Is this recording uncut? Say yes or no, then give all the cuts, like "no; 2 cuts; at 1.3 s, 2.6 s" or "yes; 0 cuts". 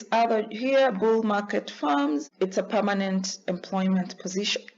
no; 1 cut; at 2.3 s